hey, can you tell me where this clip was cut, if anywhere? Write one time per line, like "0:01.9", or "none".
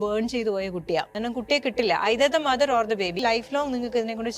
0:01.1
0:03.2